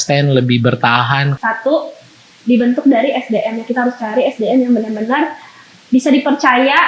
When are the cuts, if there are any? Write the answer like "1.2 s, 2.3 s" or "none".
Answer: 1.3 s